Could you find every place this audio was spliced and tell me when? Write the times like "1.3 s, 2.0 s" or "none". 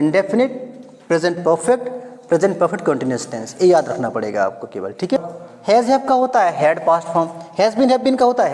5.2 s